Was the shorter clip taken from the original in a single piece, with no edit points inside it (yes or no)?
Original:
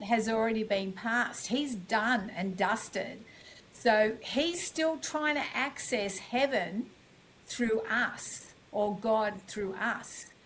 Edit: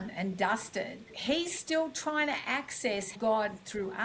no